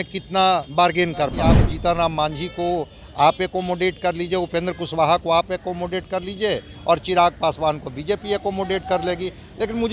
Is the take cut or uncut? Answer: cut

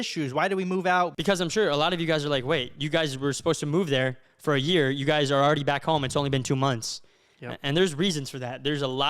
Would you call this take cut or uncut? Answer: cut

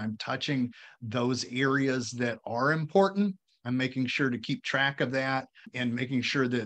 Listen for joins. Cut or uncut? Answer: cut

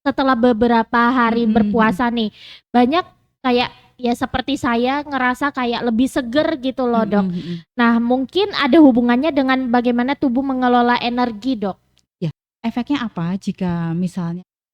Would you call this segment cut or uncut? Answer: cut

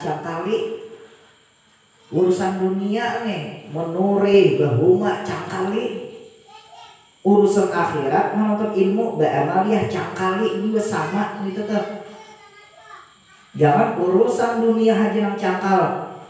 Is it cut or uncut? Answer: uncut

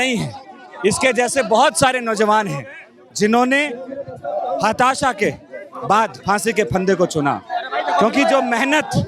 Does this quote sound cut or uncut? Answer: uncut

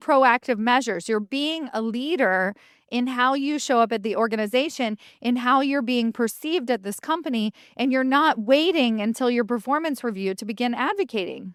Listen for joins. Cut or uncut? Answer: uncut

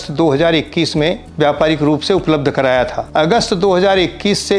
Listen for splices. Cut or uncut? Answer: cut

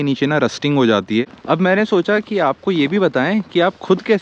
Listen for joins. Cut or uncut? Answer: cut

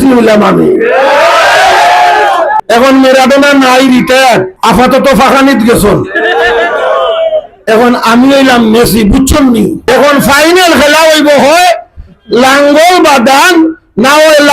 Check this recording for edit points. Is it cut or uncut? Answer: cut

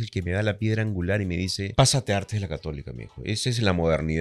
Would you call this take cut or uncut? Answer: cut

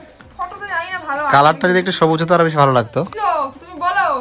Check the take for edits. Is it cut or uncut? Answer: cut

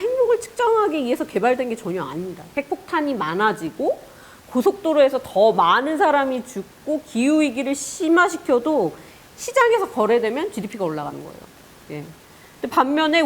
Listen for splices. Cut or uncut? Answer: cut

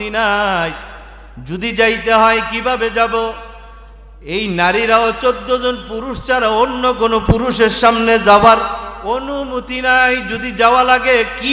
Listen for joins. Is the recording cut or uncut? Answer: uncut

